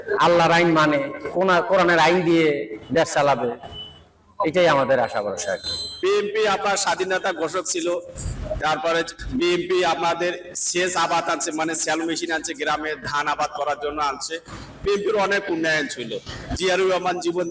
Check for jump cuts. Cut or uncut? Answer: cut